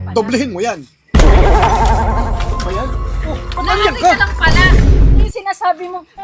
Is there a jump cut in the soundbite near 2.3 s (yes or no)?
no